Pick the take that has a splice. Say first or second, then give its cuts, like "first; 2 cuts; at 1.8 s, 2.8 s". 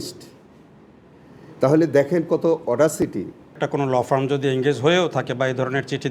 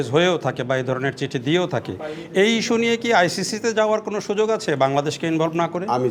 first; 1 cut; at 3.6 s